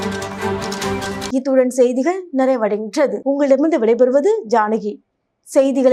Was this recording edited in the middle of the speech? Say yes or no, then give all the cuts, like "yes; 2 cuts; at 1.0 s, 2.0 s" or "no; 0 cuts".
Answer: no; 0 cuts